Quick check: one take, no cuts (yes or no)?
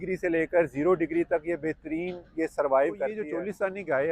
no